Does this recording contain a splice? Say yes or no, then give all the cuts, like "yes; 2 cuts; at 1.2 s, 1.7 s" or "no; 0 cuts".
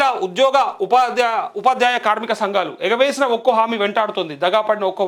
no; 0 cuts